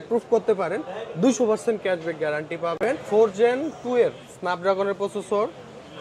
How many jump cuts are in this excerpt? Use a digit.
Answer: 1